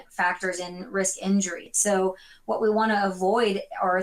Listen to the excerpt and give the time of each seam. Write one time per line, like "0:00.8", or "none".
0:01.7

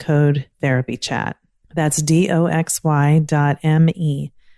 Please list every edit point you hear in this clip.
0:01.5

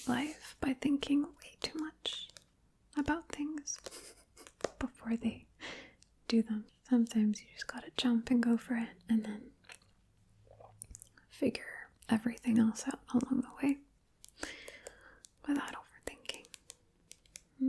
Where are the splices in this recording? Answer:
0:06.7

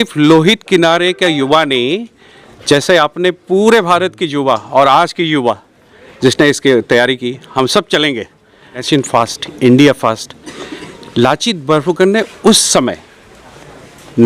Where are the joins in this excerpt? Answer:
0:08.8

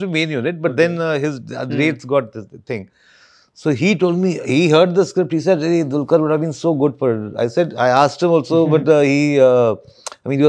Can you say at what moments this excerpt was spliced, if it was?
none

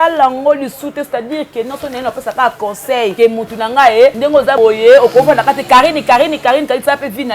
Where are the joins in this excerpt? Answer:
0:03.1
0:04.4

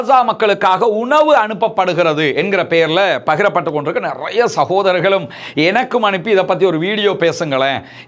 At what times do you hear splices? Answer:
none

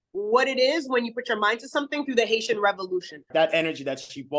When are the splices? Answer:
0:03.3

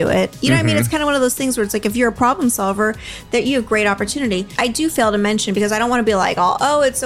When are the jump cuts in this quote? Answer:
0:04.5

